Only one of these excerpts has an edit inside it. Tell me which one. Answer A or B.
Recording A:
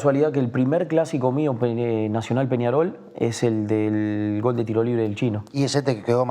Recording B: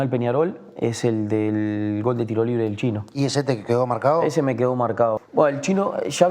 B